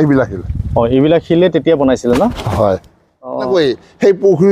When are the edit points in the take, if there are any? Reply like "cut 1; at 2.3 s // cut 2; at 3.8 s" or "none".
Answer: cut 1; at 3.5 s